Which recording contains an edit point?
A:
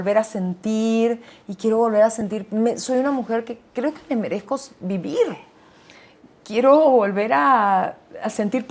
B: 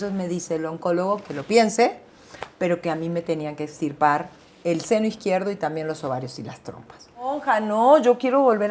B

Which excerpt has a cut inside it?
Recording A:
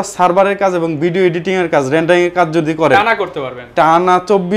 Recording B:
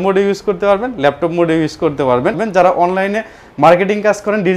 B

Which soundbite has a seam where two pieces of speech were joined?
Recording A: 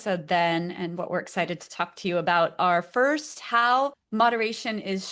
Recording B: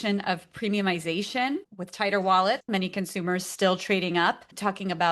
B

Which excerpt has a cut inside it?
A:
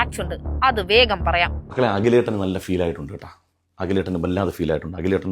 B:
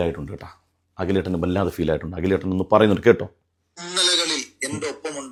A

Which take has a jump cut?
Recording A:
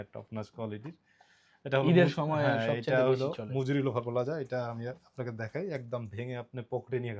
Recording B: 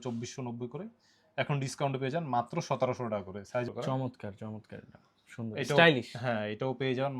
B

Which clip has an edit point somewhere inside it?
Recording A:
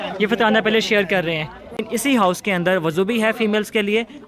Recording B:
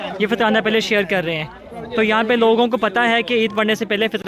A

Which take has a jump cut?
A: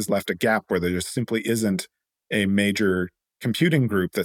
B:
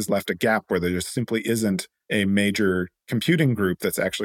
B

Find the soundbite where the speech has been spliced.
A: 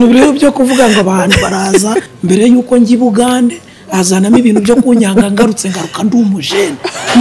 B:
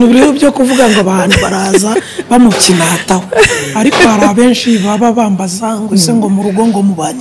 A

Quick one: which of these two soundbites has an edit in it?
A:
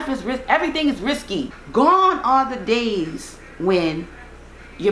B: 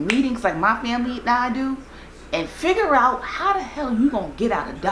A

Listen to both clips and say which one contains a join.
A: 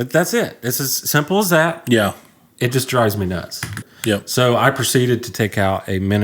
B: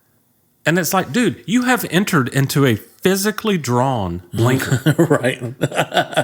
A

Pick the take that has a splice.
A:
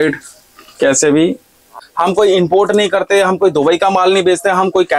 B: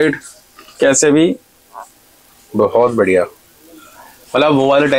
A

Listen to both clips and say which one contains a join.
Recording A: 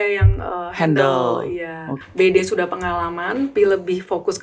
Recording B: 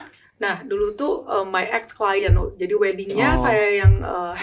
A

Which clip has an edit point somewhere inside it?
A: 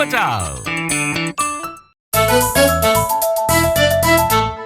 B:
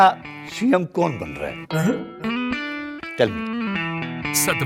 A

